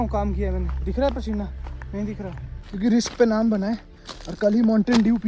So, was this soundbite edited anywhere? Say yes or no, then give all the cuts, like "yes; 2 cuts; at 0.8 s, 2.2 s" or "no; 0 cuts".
yes; 1 cut; at 2.6 s